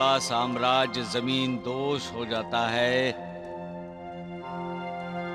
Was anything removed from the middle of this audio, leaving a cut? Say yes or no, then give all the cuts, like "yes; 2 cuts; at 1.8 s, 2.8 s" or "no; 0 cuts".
no; 0 cuts